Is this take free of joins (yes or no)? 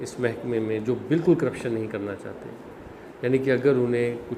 yes